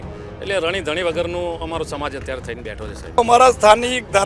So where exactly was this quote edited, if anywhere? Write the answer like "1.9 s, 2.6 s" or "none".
3.2 s